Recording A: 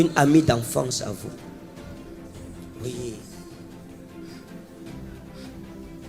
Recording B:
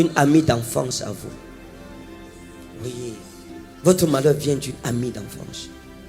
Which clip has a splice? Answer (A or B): B